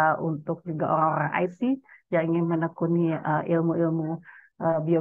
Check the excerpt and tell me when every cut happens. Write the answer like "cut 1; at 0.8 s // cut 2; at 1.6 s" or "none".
none